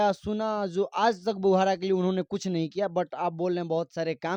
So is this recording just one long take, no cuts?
yes; 0 cuts

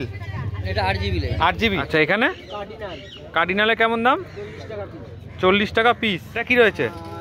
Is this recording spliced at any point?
yes; 2 cuts; at 1.8 s, 6.3 s

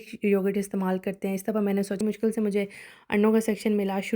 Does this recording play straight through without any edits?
no; 1 cut; at 2.0 s

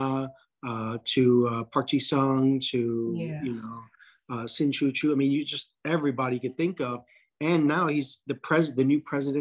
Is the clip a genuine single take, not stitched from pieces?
yes; 0 cuts

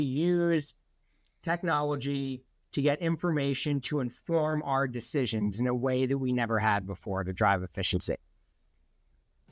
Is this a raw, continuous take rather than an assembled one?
yes; 0 cuts

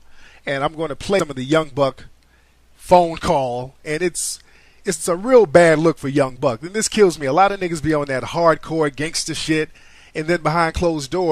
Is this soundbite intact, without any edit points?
no; 1 cut; at 9.0 s

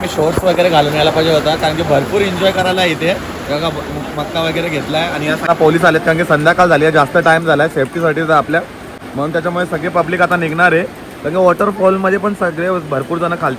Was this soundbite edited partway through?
yes; 1 cut; at 5.5 s

